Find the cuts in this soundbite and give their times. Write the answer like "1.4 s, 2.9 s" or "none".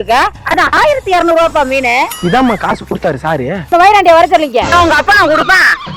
3.7 s, 4.7 s